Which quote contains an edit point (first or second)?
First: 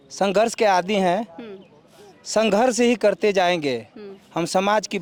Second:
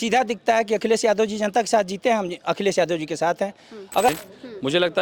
second